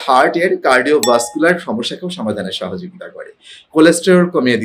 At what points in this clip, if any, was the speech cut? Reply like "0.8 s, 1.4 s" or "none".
none